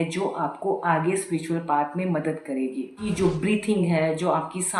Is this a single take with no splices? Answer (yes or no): no